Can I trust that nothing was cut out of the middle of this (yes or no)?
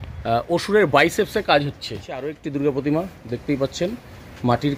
no